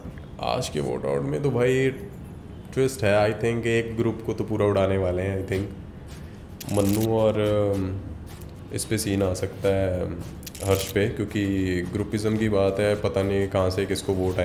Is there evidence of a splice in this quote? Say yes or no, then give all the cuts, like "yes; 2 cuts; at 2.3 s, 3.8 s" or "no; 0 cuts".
no; 0 cuts